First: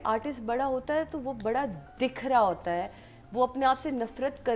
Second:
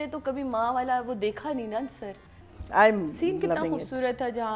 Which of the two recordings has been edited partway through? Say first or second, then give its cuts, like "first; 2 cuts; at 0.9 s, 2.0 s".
second; 1 cut; at 2.5 s